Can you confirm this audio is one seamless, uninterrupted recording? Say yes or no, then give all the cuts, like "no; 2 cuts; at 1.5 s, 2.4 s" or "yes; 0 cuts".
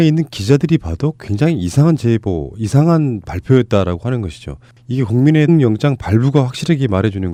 yes; 0 cuts